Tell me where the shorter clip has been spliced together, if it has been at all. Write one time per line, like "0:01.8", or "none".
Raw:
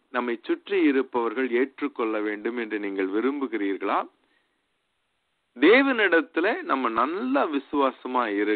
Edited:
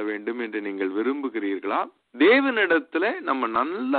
0:02.0